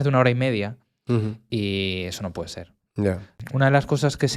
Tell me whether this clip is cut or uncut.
cut